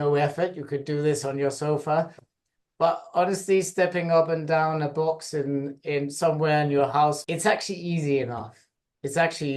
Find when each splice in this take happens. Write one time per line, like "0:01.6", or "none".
0:07.2